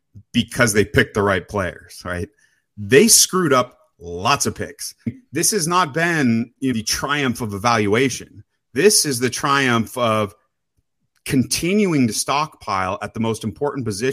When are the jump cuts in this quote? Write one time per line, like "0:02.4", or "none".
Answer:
0:05.1
0:06.7